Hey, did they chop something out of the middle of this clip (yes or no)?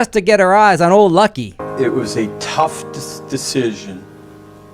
yes